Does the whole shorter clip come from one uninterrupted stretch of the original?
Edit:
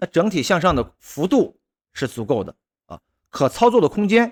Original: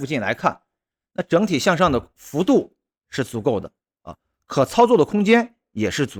yes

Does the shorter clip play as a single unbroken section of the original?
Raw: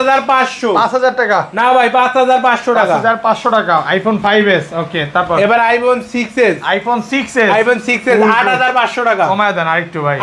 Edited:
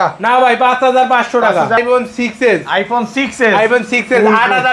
no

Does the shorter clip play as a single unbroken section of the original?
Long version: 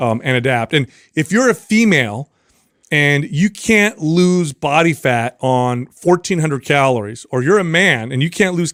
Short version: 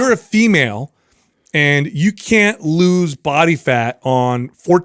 yes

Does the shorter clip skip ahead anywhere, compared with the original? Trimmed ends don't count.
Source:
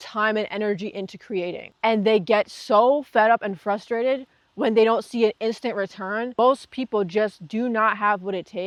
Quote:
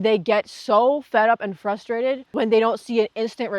yes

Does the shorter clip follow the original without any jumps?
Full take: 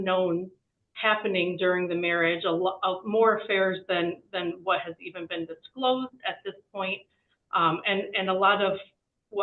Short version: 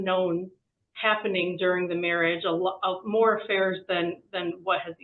yes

